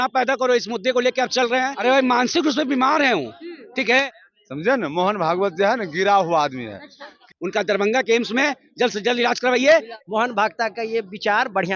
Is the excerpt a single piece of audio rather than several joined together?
no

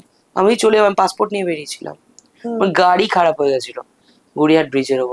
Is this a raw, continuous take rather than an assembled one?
yes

